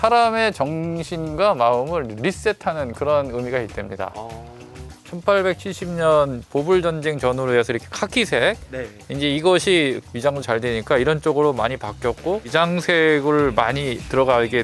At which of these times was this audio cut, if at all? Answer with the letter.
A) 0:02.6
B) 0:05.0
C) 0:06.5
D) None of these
B